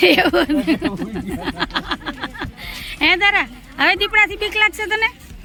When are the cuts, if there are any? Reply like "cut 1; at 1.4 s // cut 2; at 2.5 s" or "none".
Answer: none